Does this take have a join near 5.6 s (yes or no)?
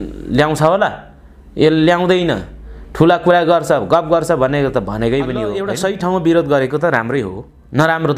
yes